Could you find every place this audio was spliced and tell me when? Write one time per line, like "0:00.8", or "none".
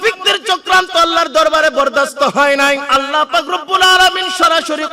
0:02.9